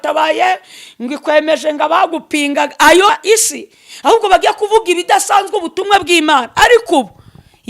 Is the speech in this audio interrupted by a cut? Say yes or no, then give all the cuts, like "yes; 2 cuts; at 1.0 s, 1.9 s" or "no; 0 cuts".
yes; 1 cut; at 3.1 s